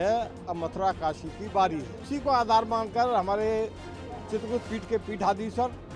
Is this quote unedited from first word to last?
no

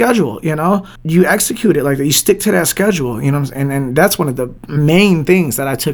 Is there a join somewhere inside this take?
yes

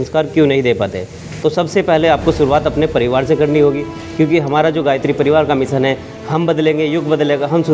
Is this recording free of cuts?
yes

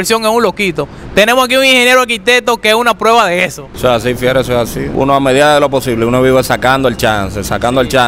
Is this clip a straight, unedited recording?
yes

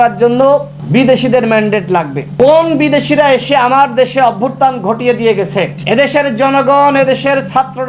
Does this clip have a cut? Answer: no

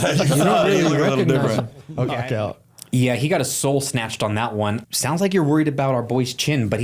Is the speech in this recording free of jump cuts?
no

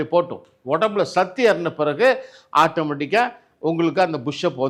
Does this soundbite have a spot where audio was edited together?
no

